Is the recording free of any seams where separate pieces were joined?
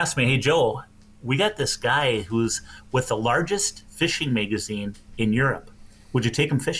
yes; 0 cuts

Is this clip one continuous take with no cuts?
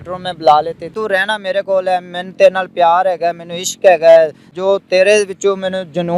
no; 2 cuts; at 0.9 s, 4.5 s

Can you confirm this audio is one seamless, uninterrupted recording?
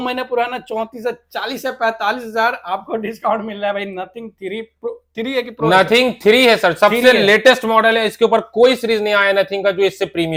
yes; 0 cuts

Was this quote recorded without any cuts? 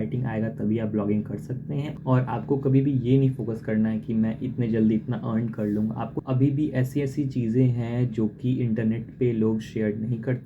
no; 2 cuts; at 1.9 s, 6.1 s

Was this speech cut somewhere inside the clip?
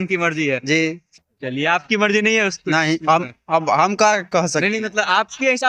no; 0 cuts

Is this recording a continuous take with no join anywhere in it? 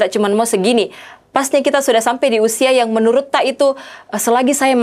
yes; 0 cuts

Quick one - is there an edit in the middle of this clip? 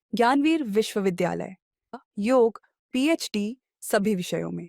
yes; 1 cut; at 1.9 s

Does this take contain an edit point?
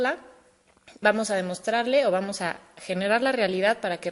yes; 1 cut; at 2.6 s

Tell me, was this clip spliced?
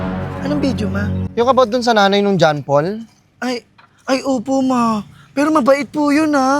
yes; 1 cut; at 1.3 s

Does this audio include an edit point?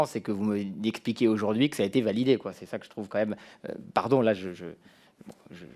no; 0 cuts

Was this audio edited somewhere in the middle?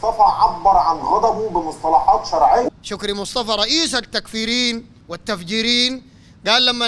yes; 1 cut; at 2.9 s

